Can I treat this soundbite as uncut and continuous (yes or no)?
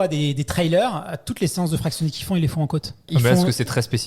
no